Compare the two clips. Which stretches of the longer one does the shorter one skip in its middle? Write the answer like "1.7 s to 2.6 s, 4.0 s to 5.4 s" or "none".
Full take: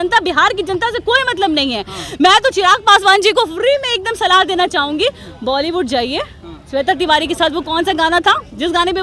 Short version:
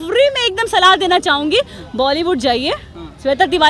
none